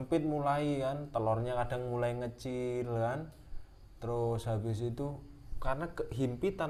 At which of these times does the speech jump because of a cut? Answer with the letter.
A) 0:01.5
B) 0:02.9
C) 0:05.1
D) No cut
D